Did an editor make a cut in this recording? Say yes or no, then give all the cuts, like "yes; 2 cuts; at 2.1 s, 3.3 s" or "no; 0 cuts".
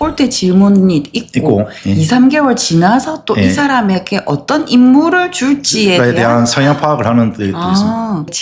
no; 0 cuts